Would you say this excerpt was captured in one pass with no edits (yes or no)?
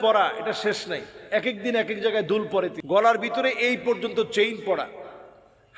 no